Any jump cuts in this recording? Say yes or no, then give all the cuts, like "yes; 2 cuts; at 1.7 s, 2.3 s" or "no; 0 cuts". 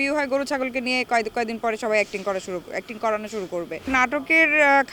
no; 0 cuts